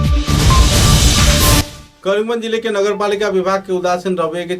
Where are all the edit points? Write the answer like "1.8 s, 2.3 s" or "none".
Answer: 1.7 s